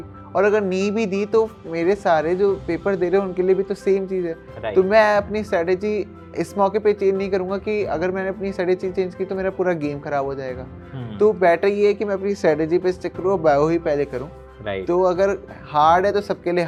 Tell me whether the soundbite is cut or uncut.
uncut